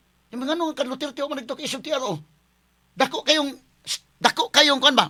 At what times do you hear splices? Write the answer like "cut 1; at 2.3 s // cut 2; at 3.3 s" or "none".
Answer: none